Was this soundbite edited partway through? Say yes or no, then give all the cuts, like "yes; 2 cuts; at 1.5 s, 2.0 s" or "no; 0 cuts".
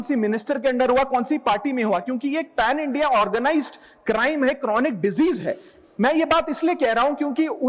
no; 0 cuts